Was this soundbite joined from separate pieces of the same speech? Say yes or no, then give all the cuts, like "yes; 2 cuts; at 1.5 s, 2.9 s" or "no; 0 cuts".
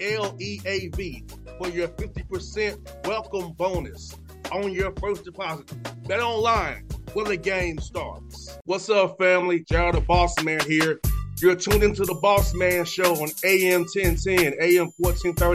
no; 0 cuts